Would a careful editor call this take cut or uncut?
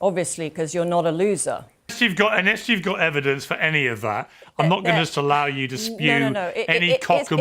cut